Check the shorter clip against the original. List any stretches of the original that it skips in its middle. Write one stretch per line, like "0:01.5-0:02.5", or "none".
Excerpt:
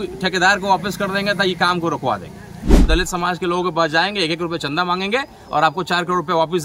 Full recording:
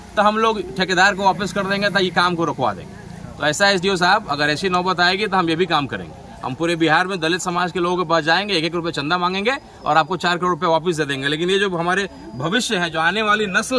0:03.4-0:07.1

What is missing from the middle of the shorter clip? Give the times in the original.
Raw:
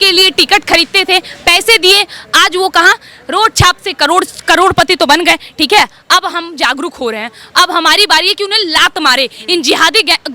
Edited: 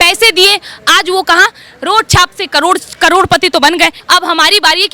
0:05.5-0:07.5

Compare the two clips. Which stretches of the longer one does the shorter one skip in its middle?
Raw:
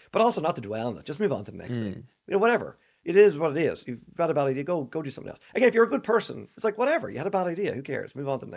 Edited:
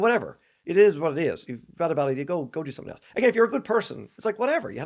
none

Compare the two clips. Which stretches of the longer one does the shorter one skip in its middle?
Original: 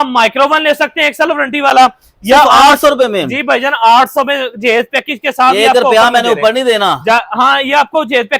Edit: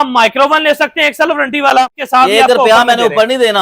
0:02.0-0:05.2

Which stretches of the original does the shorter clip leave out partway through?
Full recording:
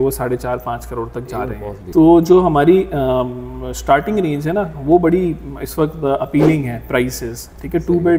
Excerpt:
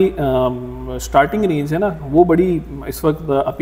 none

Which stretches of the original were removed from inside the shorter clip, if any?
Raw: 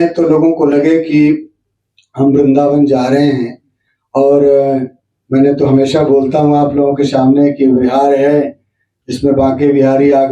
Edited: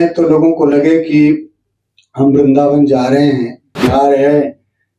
0:03.8-0:07.8

